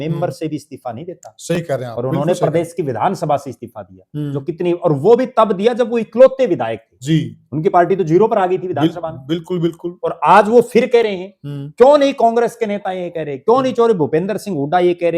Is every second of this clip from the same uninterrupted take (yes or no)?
yes